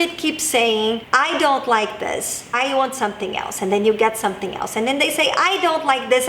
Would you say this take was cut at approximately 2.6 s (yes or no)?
yes